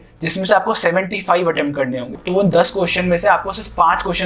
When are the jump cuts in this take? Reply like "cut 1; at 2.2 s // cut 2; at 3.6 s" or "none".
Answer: cut 1; at 2.2 s